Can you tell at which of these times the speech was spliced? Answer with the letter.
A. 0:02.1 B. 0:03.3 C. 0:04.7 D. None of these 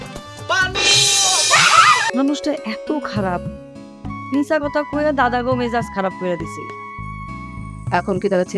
A